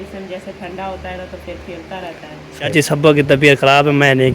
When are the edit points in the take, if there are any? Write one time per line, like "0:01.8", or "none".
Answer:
0:02.7